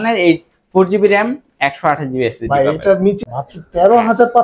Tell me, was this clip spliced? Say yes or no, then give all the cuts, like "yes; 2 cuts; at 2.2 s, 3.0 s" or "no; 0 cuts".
yes; 1 cut; at 3.3 s